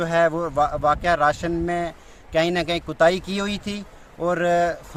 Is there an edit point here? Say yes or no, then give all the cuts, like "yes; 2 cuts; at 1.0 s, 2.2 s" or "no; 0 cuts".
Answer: no; 0 cuts